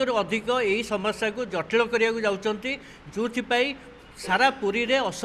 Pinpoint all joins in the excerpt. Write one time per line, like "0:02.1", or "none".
none

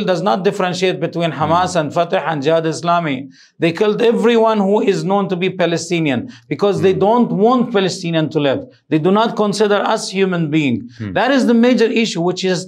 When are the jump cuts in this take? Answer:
none

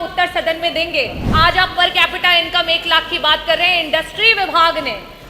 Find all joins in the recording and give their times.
0:01.2

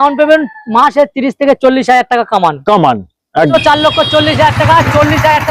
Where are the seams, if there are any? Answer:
0:03.5

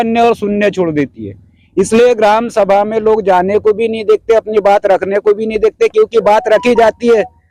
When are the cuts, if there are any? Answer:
none

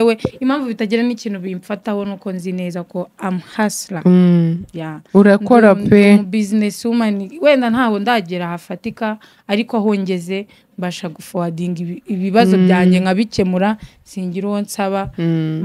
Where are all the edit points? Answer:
none

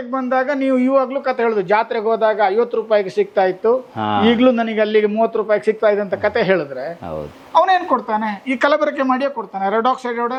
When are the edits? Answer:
none

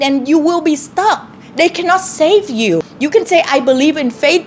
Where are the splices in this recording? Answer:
0:02.9

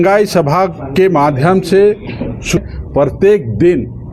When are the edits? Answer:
0:02.6

